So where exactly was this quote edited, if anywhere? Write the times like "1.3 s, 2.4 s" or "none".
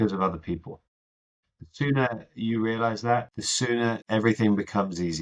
3.9 s